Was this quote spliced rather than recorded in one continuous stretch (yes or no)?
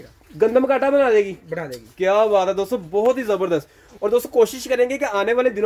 no